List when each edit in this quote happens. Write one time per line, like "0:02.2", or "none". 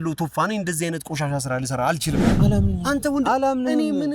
0:02.3